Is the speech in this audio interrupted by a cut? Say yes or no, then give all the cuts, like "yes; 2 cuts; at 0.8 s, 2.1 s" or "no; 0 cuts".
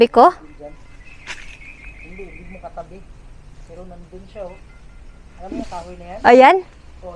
no; 0 cuts